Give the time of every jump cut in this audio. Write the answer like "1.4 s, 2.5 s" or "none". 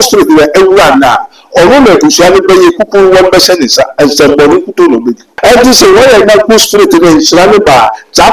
5.3 s